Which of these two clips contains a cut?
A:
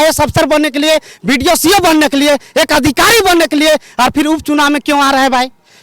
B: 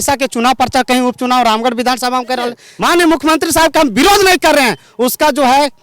B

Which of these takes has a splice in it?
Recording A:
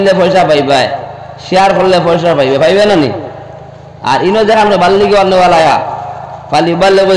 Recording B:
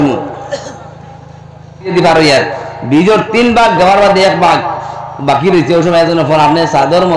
B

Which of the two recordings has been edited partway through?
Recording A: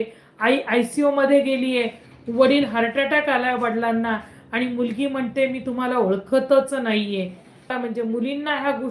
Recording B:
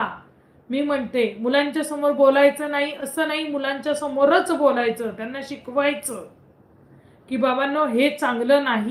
A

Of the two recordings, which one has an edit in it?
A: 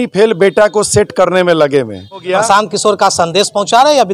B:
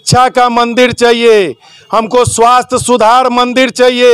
A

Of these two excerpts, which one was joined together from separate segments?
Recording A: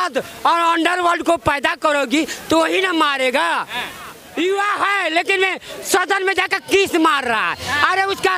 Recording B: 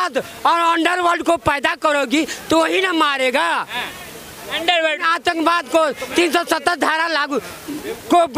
A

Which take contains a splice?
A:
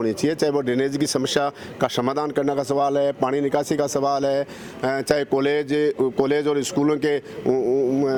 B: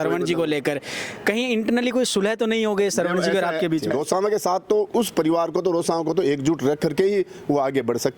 B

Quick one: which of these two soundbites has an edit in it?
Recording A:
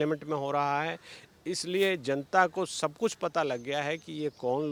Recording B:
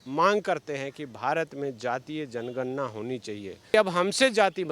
B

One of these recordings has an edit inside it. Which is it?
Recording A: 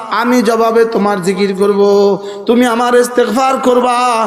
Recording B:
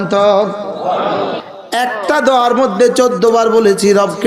B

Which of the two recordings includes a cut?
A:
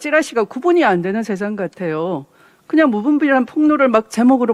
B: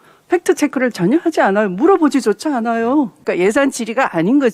B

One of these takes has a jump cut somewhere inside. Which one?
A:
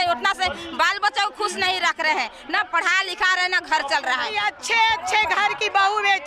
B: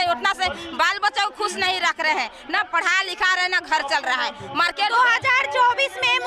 A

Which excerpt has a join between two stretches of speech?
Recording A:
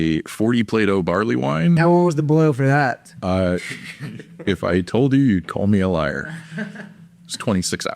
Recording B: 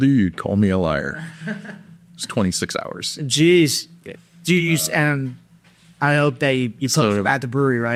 A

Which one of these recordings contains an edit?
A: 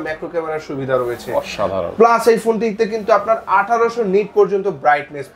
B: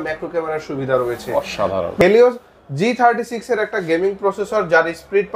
B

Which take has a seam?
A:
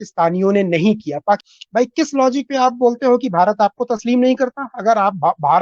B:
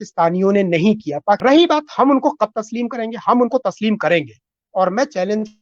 B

